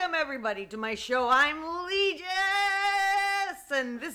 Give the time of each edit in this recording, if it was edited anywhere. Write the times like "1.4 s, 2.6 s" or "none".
none